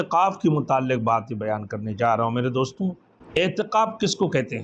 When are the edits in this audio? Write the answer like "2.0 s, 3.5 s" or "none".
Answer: 3.1 s